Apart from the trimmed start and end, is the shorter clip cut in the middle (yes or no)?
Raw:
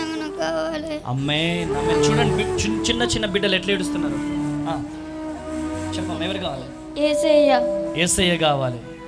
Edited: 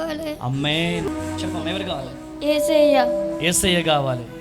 yes